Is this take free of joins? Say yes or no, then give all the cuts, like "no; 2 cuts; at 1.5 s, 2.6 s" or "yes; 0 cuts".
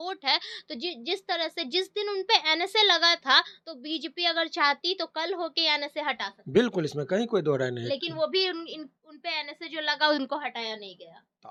yes; 0 cuts